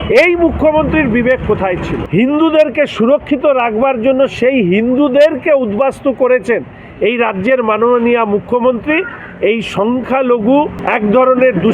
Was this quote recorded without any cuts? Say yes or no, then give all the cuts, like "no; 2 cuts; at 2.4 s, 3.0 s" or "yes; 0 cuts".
no; 2 cuts; at 2.0 s, 10.8 s